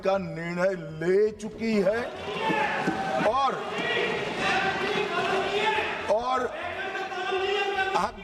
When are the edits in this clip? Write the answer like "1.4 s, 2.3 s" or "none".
none

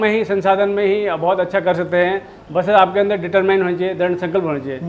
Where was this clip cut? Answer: none

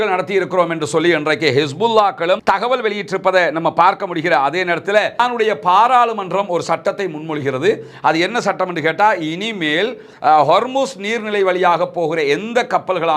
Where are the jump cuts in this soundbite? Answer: 5.2 s

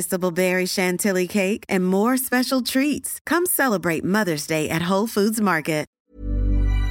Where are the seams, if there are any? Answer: 5.9 s

